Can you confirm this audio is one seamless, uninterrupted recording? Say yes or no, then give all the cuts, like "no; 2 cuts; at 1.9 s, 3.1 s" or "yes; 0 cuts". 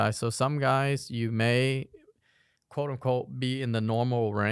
yes; 0 cuts